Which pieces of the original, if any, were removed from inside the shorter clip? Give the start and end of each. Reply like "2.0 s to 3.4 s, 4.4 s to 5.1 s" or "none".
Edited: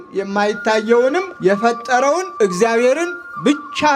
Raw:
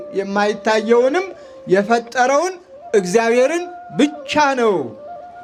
1.3 s to 1.6 s, 2.5 s to 2.8 s

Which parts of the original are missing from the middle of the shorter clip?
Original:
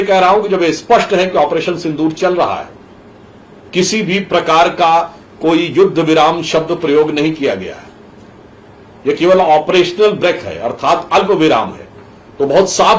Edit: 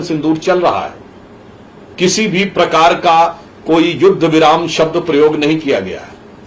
none

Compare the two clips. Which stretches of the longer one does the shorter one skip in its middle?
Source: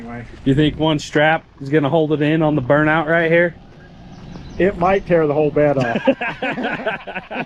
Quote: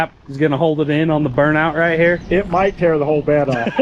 3.5 s to 4.5 s

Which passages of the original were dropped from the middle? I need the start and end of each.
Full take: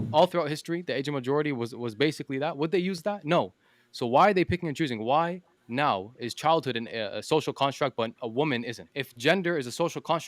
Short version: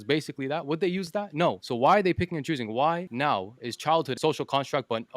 3.5 s to 3.9 s, 5.4 s to 5.7 s, 6.7 s to 7.2 s

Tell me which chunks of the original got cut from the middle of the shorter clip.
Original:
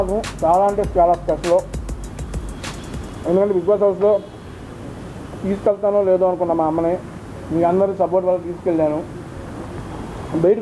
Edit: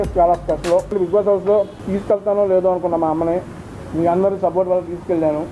1.7 s to 3.5 s, 4.7 s to 5.7 s

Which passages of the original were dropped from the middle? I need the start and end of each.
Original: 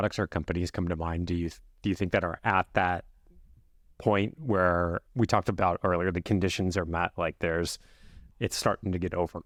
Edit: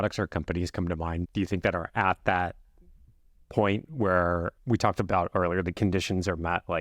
1.3 s to 1.7 s

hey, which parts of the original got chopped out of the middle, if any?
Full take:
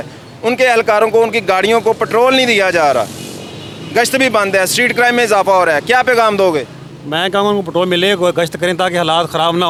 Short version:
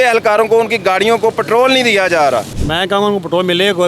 3.2 s to 7.0 s

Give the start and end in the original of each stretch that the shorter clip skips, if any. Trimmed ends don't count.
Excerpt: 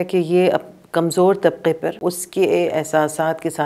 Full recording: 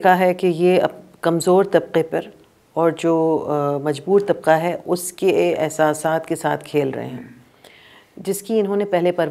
2.3 s to 4.8 s

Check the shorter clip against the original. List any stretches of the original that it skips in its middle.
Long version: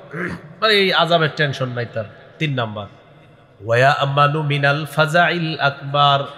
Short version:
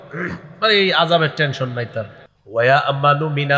2.2 s to 3.3 s

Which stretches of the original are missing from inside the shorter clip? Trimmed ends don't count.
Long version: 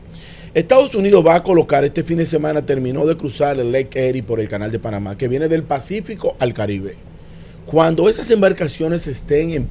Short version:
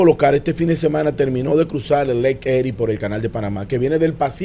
none

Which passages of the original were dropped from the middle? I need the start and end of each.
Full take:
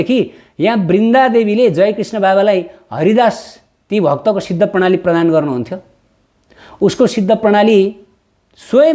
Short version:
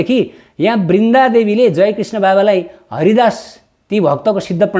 none

